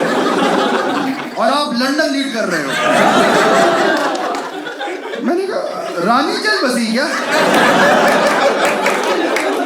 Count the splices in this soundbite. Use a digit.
0